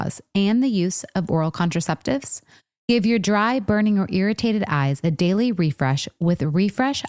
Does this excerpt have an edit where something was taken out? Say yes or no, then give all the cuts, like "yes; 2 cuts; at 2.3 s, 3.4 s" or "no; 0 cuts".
no; 0 cuts